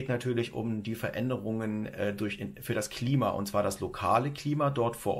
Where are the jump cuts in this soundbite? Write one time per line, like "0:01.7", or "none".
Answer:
none